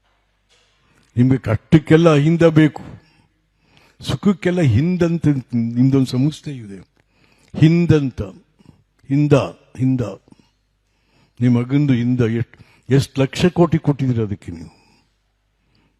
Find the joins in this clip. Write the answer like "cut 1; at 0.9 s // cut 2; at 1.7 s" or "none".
none